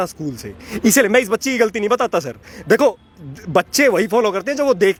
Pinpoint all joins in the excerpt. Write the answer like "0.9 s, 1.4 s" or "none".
none

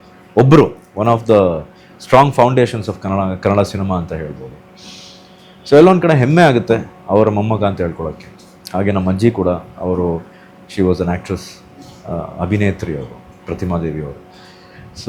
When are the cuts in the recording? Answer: none

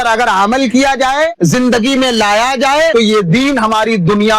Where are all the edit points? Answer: 1.3 s, 2.9 s

